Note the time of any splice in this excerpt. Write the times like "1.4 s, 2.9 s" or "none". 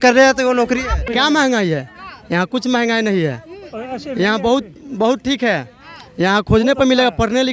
1.1 s

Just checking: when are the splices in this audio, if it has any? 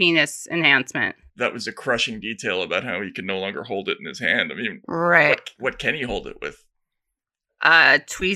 1.3 s

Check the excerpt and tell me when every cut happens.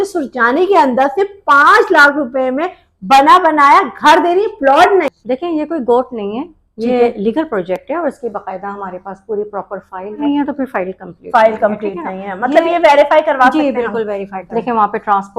5.1 s, 10.2 s, 14.4 s

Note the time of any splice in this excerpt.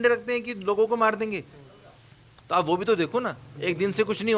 3.4 s

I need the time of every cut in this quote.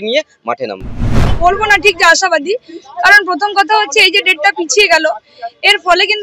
1.3 s

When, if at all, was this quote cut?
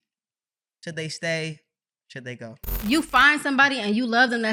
2.7 s

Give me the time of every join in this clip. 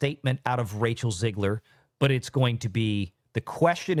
none

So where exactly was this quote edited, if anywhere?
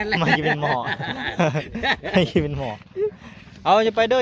3.3 s

